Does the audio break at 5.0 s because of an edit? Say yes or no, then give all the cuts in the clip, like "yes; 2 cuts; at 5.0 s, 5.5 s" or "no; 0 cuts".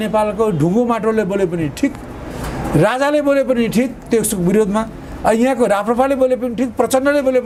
no; 0 cuts